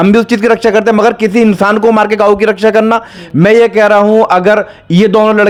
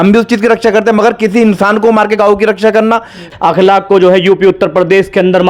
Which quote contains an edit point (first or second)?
second